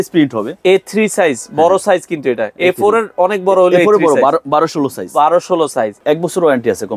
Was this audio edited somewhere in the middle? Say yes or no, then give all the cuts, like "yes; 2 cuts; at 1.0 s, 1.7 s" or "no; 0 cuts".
yes; 1 cut; at 5.9 s